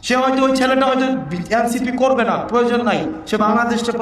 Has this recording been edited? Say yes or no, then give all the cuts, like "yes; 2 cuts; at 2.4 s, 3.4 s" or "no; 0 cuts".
no; 0 cuts